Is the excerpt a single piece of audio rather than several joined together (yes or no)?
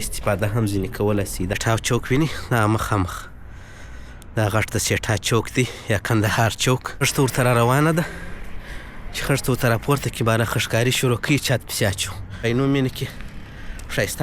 no